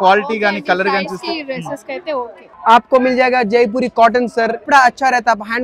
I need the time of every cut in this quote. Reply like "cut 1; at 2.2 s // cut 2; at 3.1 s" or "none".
cut 1; at 2.4 s // cut 2; at 4.7 s